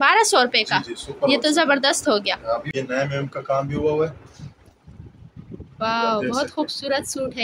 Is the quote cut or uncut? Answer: cut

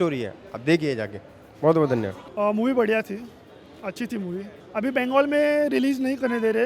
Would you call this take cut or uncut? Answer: uncut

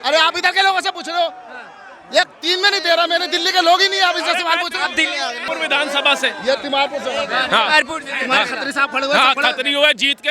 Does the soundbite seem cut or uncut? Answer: uncut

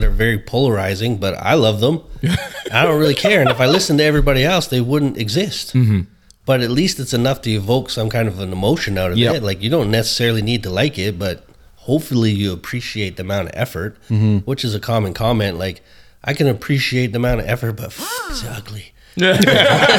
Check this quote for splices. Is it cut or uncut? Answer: uncut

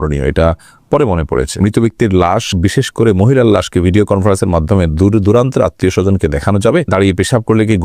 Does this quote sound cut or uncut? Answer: cut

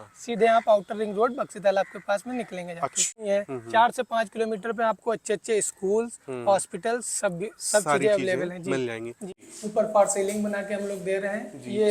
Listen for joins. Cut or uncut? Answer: cut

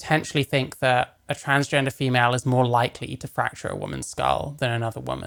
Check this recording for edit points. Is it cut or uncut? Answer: uncut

